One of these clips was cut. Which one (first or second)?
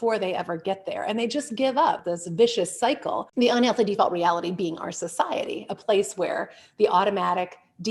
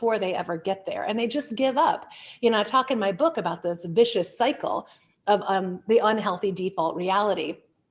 first